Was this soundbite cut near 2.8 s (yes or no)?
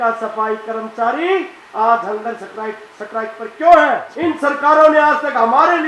no